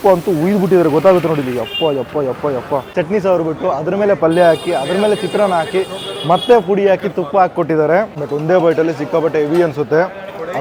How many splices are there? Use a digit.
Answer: 2